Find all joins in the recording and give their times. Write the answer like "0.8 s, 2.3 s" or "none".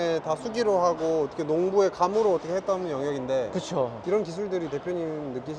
3.9 s